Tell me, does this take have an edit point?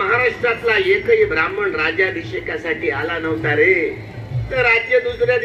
yes; 1 cut; at 4.5 s

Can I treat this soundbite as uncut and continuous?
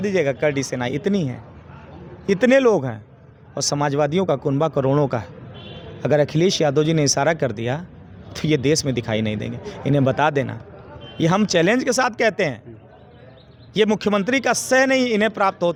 yes; 0 cuts

